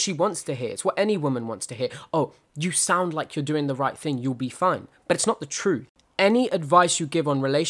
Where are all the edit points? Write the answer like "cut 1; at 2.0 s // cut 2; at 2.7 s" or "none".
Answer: cut 1; at 6.0 s